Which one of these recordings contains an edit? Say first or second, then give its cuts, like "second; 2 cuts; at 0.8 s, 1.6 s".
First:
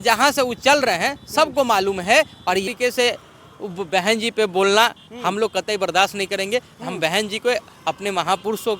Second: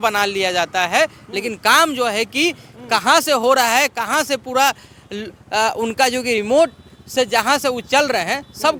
first; 1 cut; at 2.7 s